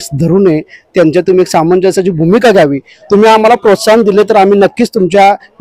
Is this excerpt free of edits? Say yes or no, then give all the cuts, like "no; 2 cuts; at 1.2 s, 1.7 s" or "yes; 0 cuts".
yes; 0 cuts